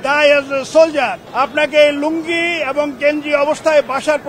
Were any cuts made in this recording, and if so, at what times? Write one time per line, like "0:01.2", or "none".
0:01.2